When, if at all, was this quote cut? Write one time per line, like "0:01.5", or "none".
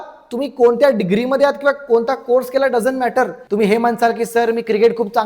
0:03.4